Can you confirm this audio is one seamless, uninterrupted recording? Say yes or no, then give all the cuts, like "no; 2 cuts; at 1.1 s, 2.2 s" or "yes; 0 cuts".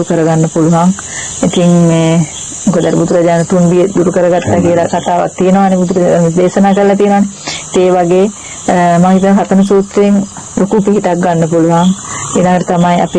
yes; 0 cuts